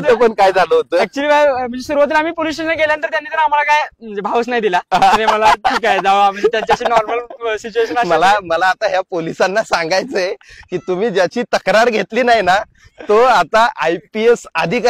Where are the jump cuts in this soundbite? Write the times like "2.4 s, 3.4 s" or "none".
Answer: none